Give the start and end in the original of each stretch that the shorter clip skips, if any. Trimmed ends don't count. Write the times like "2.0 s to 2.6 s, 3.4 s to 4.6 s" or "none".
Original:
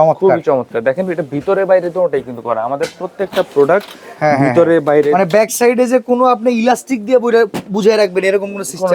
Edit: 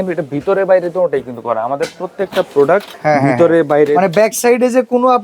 3.9 s to 4.1 s